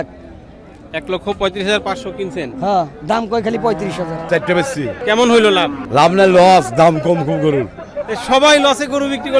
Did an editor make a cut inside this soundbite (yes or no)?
yes